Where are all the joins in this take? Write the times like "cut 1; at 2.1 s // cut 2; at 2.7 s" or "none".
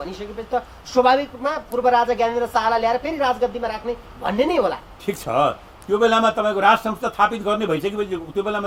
none